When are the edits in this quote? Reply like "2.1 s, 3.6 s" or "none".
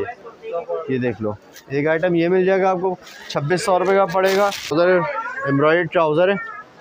4.7 s

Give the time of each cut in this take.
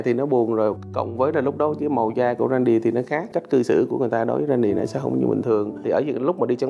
3.3 s, 5.8 s

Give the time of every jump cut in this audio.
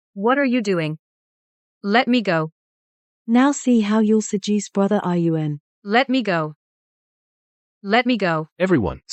none

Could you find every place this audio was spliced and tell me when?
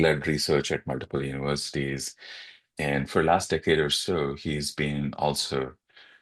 none

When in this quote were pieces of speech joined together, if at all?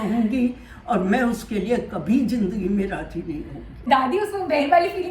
3.8 s

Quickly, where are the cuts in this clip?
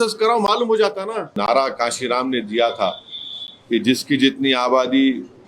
1.3 s

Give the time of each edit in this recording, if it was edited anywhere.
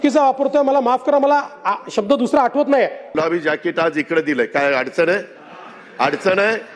3.2 s

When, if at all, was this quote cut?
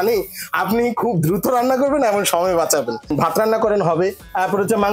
3.1 s

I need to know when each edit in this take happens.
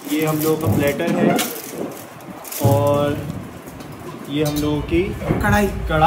none

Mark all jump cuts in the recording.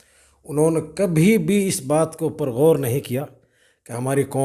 none

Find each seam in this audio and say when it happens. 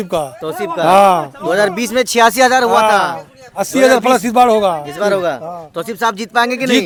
none

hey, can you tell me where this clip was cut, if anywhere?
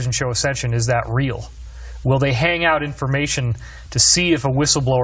none

